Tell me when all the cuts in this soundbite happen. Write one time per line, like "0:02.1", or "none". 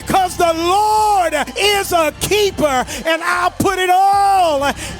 0:01.5